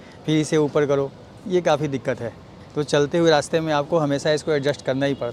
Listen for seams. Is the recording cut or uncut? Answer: uncut